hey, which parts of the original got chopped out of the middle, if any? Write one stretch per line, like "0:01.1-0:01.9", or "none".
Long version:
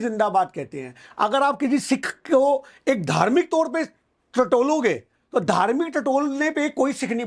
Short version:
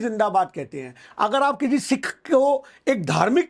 none